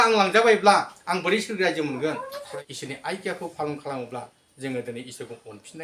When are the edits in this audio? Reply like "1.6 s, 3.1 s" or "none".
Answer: 2.4 s